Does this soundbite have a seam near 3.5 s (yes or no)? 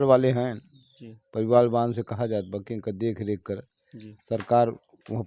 no